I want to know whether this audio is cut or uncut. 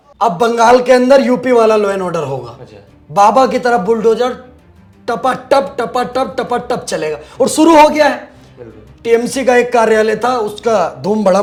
uncut